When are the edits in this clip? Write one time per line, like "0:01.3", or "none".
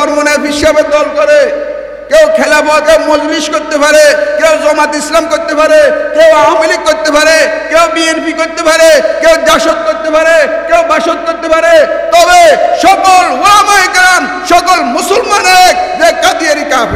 0:02.8